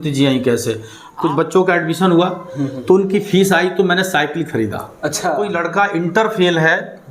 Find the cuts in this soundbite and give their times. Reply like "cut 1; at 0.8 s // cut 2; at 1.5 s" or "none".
cut 1; at 1.0 s // cut 2; at 5.5 s